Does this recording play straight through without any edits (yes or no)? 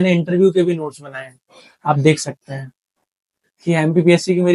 yes